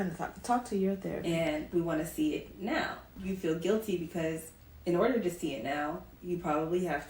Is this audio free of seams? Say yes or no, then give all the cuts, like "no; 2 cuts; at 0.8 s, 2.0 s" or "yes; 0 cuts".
no; 2 cuts; at 1.2 s, 3.1 s